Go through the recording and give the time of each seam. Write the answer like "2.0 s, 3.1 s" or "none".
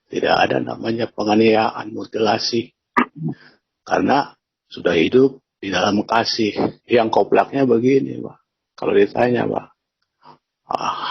6.8 s